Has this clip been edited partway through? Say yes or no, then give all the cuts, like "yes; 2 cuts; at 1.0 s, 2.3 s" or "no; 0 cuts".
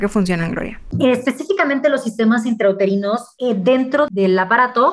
yes; 3 cuts; at 0.9 s, 3.3 s, 4.1 s